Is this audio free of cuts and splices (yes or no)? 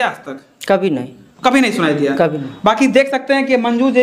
yes